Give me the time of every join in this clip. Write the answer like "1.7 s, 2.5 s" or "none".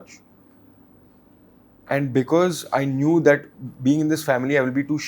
none